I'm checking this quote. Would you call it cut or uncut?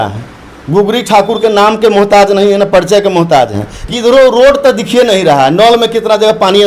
cut